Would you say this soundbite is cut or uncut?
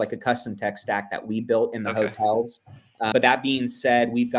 cut